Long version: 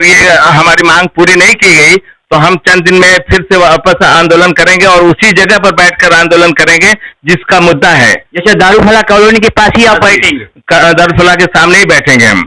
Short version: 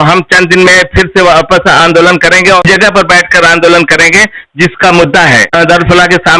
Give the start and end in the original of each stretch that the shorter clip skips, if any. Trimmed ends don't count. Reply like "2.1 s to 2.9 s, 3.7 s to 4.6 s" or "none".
5.0 s to 5.3 s, 8.2 s to 10.8 s